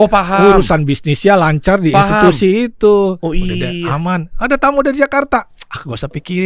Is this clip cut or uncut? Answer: uncut